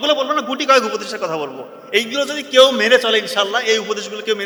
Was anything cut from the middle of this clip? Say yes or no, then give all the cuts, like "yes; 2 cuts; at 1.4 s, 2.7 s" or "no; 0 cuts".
no; 0 cuts